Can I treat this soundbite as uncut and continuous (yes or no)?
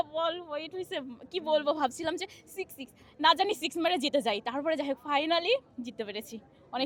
yes